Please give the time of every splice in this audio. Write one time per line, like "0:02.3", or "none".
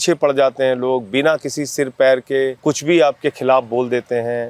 0:02.6